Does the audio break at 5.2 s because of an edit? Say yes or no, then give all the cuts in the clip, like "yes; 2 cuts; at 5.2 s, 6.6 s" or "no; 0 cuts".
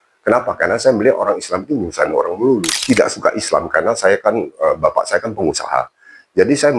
no; 1 cut; at 2.7 s